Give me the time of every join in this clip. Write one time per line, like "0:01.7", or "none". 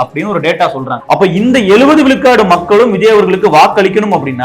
0:00.9

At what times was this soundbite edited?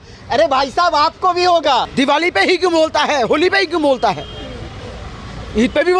0:01.9

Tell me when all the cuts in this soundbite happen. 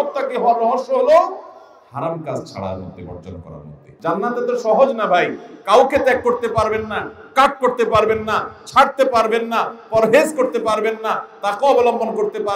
0:03.8

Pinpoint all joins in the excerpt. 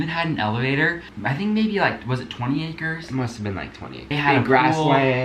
0:01.2
0:03.9

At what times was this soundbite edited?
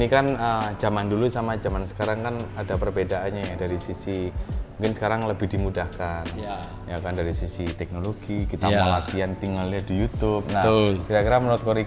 none

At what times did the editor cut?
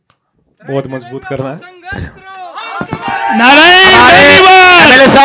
none

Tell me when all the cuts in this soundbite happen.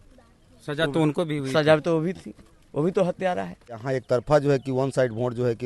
0:03.8

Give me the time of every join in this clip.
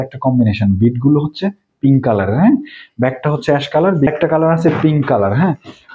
0:04.1

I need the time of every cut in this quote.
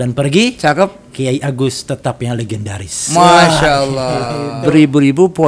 0:04.4

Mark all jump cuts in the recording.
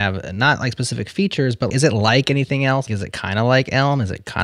0:01.7
0:02.8

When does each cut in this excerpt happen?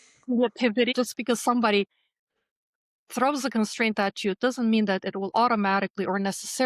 0:00.9

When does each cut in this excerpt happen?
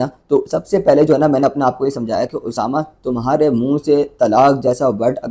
none

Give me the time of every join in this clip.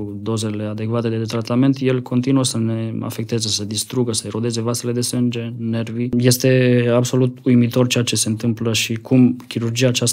0:06.1

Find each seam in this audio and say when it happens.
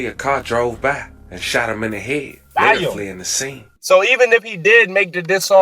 0:03.7

